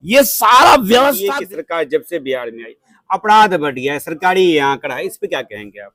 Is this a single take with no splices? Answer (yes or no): no